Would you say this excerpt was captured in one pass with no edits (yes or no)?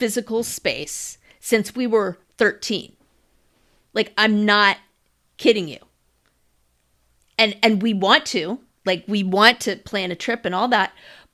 yes